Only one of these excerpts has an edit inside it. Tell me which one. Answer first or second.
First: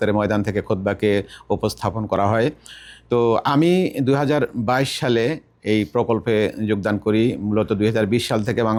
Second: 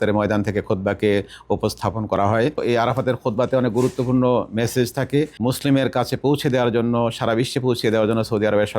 second